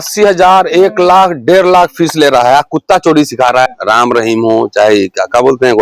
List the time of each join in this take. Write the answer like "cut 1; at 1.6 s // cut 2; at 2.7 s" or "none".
cut 1; at 3.8 s